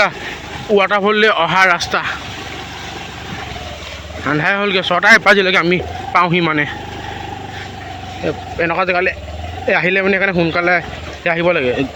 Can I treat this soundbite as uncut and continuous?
yes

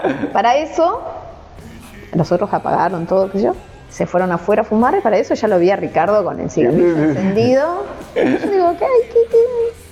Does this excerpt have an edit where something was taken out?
no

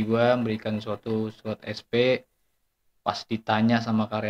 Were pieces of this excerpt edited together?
no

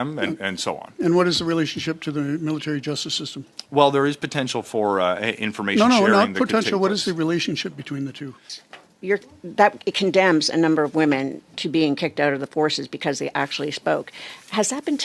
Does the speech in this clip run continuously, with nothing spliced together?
no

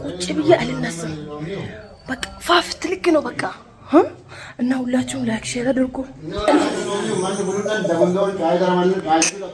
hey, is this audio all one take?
yes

